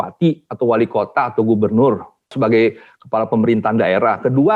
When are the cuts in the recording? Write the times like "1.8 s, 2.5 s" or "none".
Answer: 2.3 s